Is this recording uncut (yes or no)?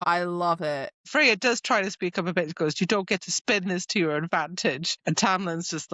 no